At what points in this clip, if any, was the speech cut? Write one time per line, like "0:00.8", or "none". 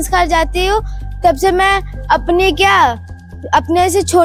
none